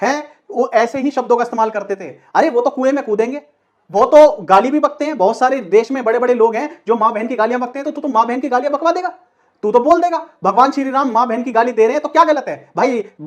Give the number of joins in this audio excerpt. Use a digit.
0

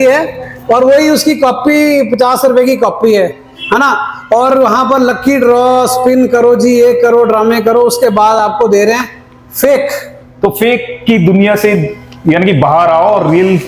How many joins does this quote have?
0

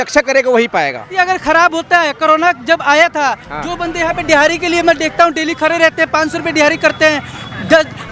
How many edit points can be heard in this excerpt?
1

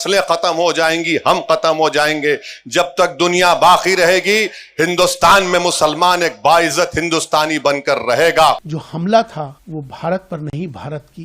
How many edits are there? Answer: 2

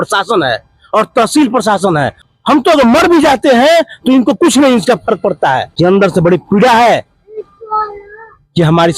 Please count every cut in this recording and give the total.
2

